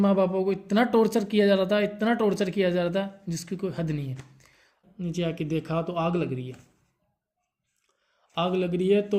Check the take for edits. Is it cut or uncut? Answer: cut